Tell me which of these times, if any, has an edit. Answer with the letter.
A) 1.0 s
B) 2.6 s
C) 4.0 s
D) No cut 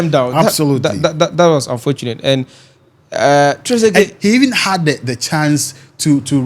D